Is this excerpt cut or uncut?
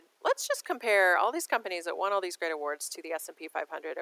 uncut